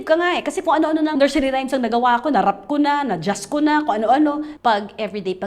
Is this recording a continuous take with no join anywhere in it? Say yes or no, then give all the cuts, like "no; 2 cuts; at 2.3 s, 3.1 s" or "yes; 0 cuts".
no; 2 cuts; at 1.1 s, 4.5 s